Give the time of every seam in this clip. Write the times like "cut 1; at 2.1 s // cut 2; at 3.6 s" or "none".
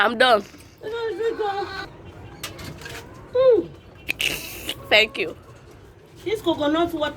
cut 1; at 1.9 s

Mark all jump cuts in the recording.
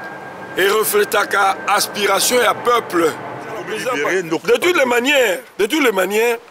cut 1; at 3.8 s

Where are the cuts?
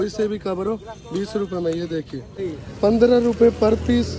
cut 1; at 2.3 s

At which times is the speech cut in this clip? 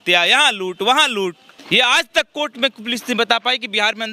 cut 1; at 1.5 s

